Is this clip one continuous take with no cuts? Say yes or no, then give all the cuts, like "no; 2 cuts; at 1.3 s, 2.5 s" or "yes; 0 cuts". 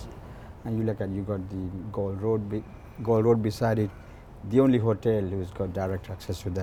yes; 0 cuts